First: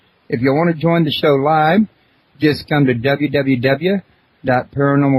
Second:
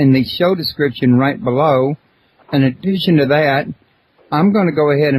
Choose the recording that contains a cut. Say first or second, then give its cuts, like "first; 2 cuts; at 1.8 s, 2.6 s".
first; 1 cut; at 2.1 s